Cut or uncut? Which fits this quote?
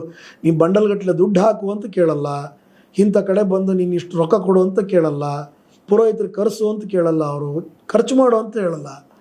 uncut